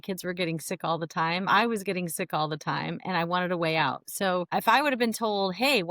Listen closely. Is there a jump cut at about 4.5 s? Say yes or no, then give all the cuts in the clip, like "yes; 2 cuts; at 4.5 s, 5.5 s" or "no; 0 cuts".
yes; 1 cut; at 4.5 s